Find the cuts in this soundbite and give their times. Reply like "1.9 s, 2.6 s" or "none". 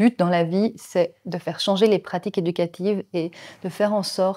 none